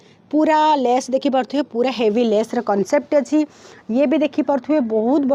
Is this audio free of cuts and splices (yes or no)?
yes